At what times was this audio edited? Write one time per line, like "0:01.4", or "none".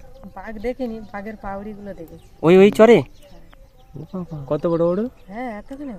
none